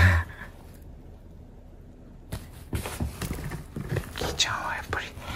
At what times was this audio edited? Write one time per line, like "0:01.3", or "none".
none